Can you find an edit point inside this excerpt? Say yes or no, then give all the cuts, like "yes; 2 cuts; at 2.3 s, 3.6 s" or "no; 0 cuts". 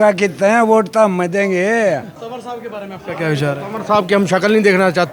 yes; 1 cut; at 2.2 s